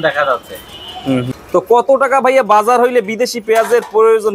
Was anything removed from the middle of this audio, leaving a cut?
yes; 1 cut; at 1.3 s

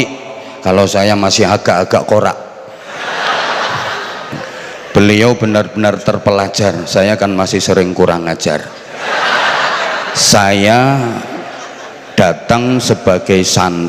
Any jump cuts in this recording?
no; 0 cuts

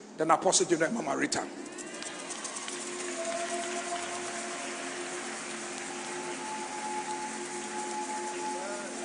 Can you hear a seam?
no; 0 cuts

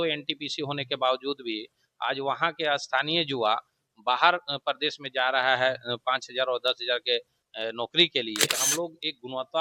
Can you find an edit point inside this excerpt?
yes; 1 cut; at 8.6 s

